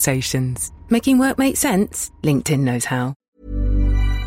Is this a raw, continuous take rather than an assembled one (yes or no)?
no